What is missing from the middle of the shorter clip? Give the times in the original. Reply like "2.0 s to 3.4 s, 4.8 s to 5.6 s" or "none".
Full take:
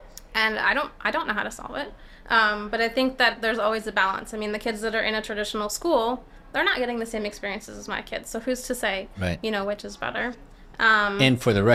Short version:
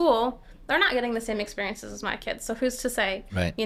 none